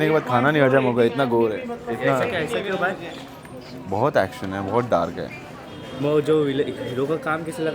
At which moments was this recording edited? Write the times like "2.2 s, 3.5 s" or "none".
none